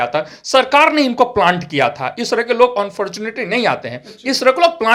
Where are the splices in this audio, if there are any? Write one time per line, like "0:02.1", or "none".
none